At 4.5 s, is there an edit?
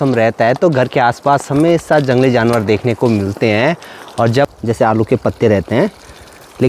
yes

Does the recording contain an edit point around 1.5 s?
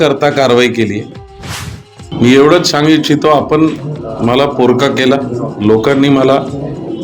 yes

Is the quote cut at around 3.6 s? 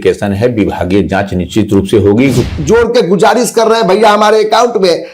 no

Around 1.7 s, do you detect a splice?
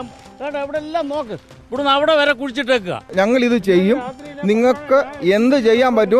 no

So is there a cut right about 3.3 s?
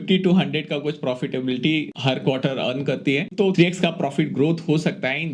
yes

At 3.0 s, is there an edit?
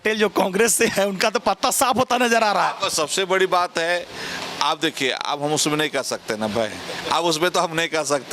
no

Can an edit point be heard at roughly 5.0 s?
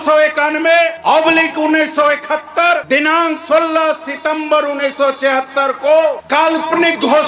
no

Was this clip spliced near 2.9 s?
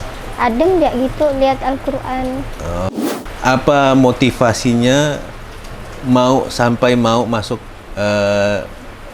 yes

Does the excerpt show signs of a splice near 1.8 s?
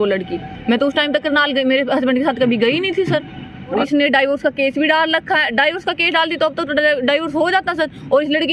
no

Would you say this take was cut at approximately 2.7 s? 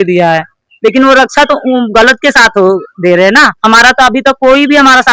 no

